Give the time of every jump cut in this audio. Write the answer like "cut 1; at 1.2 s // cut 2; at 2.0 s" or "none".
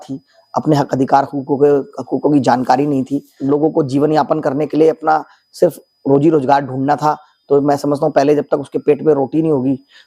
cut 1; at 3.3 s